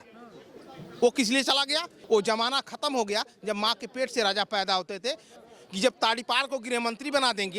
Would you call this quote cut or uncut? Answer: cut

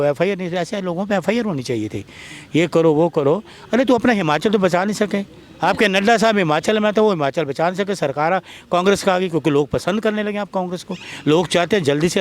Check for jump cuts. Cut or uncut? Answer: uncut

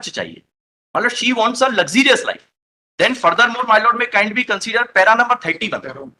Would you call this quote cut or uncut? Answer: uncut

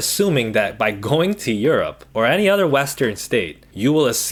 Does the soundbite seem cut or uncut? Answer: uncut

